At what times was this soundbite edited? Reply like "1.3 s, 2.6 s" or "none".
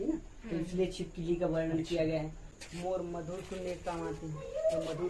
2.5 s